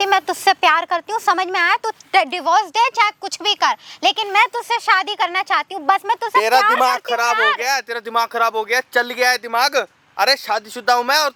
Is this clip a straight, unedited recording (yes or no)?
yes